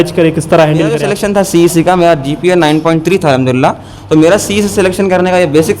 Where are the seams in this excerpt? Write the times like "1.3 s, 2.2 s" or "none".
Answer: 1.1 s